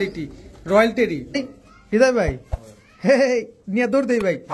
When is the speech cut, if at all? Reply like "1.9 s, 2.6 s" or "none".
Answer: 1.5 s